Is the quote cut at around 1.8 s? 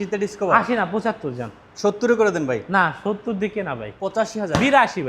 no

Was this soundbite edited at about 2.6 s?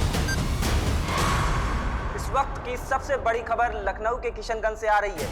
no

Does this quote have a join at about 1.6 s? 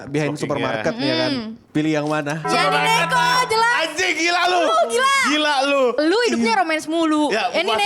yes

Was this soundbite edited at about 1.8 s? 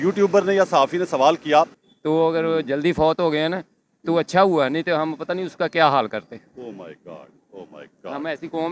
yes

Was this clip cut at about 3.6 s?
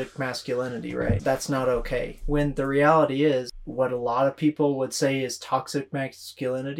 yes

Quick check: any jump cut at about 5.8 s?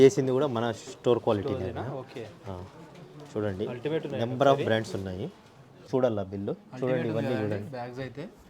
yes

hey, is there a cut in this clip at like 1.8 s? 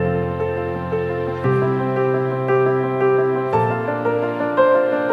no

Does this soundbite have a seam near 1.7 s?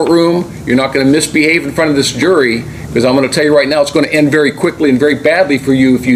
no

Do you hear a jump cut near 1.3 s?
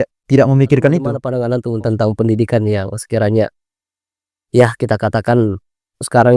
yes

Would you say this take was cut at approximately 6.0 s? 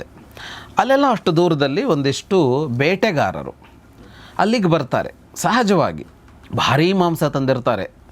yes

